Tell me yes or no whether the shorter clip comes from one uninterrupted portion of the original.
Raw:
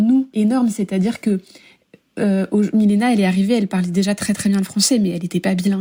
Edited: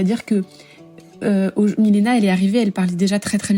yes